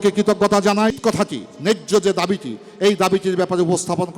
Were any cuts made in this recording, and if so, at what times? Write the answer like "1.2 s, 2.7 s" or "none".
1.0 s